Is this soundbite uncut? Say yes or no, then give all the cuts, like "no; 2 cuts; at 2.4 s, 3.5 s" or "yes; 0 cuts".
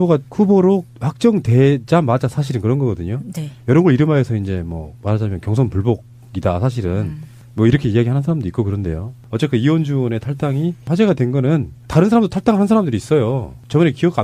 yes; 0 cuts